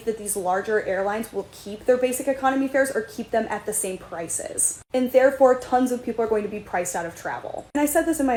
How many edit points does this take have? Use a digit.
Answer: 0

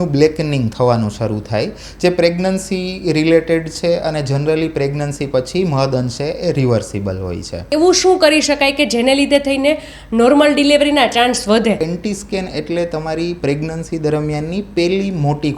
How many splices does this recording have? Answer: 2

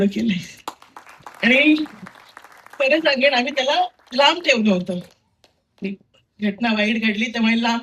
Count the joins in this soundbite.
0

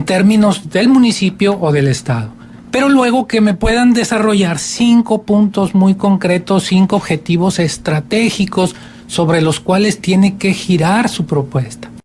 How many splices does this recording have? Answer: 1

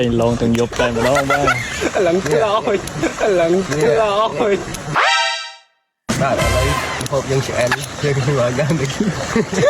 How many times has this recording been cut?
0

